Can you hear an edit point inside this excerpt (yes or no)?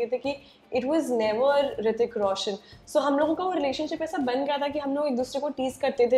no